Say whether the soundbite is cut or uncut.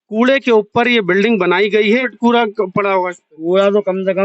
cut